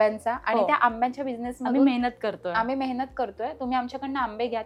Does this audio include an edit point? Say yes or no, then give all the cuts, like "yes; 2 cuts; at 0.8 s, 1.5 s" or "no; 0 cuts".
no; 0 cuts